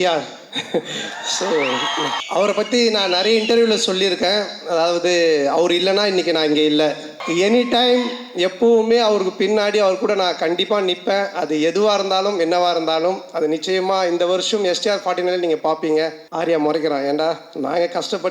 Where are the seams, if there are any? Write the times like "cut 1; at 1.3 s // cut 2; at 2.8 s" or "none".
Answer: cut 1; at 2.2 s // cut 2; at 7.1 s // cut 3; at 16.2 s